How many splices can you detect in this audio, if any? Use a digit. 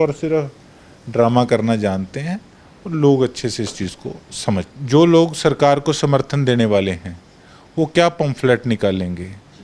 1